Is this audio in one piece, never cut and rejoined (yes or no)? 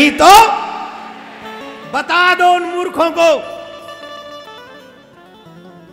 yes